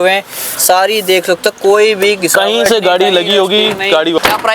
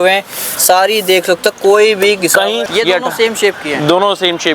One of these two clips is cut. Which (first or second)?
second